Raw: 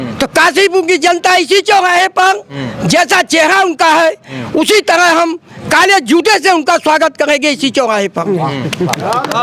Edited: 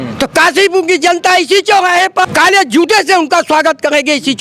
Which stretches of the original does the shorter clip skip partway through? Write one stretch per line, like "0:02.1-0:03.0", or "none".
0:02.2-0:05.6